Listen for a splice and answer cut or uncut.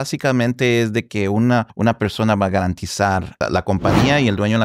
cut